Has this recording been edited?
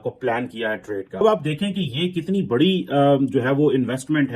yes; 1 cut; at 1.1 s

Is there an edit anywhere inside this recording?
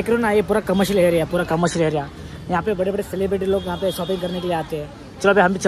no; 0 cuts

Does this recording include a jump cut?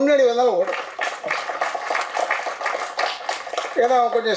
no; 0 cuts

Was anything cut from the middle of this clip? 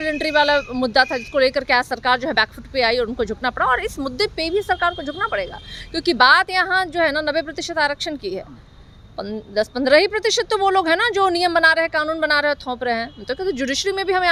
no; 0 cuts

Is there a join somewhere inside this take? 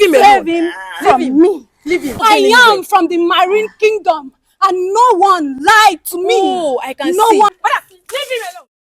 yes; 2 cuts; at 2.2 s, 7.5 s

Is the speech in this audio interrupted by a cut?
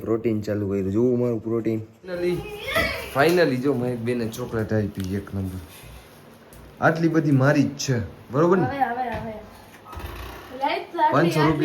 yes; 1 cut; at 2.2 s

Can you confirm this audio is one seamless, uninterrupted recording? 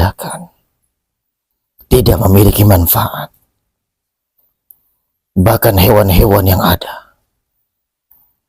yes; 0 cuts

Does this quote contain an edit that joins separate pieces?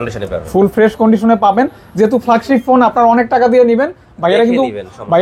no; 0 cuts

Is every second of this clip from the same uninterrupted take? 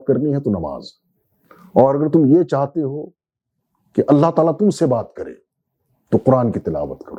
yes; 0 cuts

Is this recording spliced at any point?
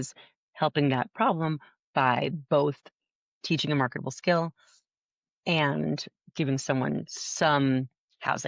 no; 0 cuts

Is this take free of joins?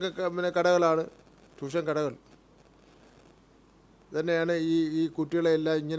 yes; 0 cuts

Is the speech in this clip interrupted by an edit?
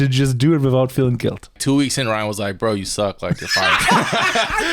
yes; 1 cut; at 1.5 s

